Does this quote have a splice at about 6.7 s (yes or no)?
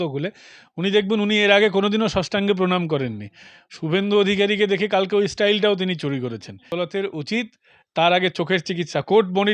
yes